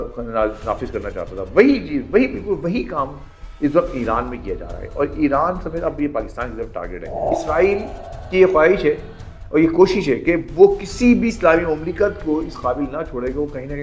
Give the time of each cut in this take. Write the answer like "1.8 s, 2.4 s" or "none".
7.4 s